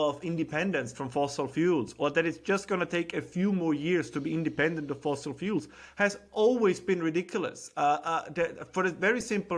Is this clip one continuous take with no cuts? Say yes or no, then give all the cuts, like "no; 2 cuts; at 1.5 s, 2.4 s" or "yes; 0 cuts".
yes; 0 cuts